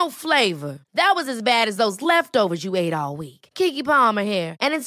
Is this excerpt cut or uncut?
uncut